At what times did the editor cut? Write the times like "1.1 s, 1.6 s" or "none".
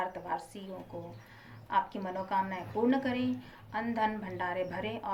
none